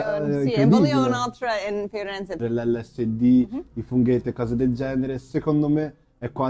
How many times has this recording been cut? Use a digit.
1